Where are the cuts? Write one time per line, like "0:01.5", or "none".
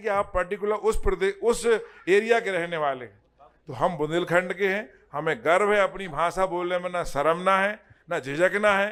none